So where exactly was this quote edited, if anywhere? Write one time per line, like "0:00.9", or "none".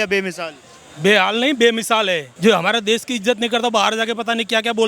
0:02.3